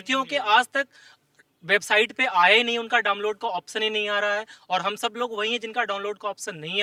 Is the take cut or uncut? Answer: uncut